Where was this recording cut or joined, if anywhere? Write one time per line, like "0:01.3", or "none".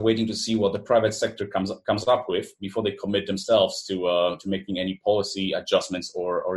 none